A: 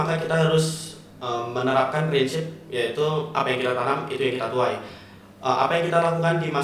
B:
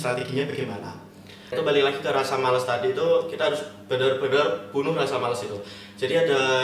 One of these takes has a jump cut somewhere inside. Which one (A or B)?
B